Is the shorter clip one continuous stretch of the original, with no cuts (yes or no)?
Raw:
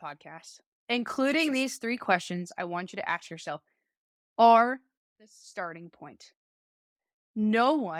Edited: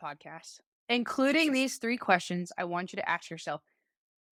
yes